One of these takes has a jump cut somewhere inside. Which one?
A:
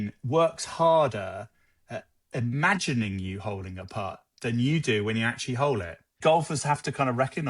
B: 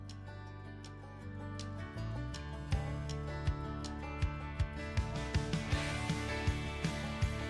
A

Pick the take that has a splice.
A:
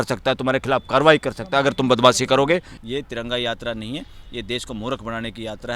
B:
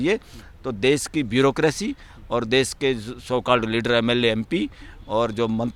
A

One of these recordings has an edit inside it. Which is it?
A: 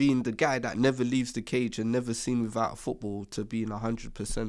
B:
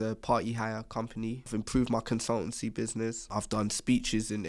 B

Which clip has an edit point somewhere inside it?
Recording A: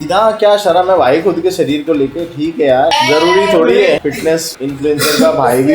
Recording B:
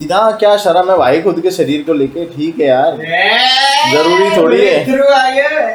A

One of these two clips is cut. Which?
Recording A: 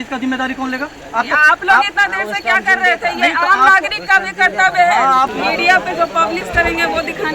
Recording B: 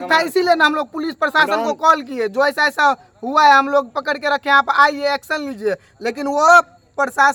A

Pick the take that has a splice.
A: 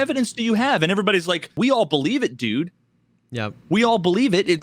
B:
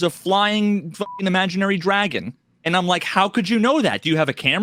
A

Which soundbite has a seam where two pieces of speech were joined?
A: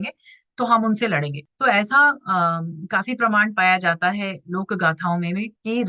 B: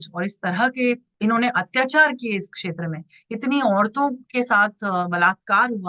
B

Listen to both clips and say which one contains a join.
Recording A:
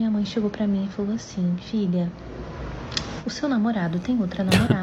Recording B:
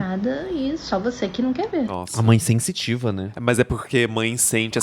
B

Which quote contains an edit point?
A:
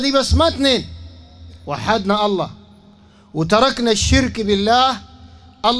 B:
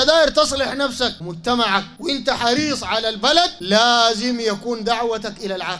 B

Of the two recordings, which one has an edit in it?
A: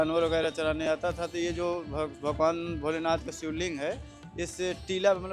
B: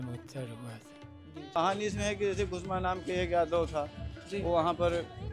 B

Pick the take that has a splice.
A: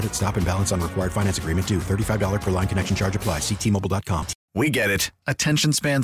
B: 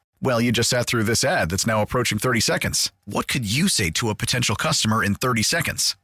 A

